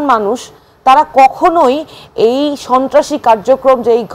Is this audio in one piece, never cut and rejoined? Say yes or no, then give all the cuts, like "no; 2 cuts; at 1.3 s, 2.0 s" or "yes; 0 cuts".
yes; 0 cuts